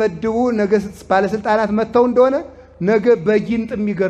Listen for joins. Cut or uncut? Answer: uncut